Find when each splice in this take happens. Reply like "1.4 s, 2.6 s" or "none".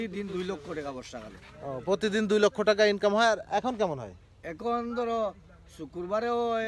none